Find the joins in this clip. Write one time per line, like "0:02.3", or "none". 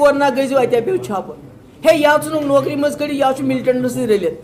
none

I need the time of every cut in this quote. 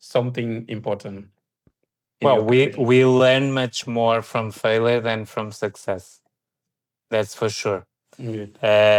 none

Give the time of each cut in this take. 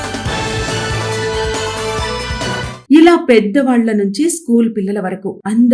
0:02.7

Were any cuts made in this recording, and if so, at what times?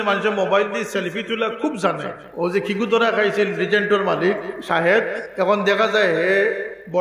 0:02.2

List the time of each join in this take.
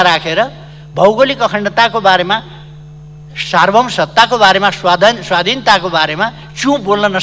none

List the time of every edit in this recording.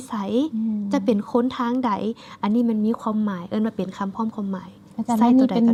none

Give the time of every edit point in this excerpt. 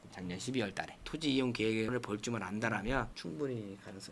0:01.0
0:03.1

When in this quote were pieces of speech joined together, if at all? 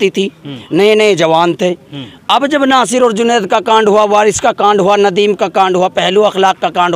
none

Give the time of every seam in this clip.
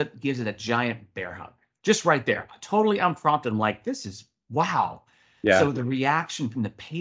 none

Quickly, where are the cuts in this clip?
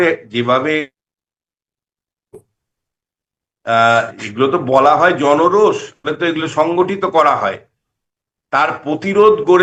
none

